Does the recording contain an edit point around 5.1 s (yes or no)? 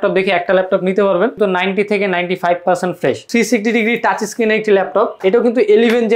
yes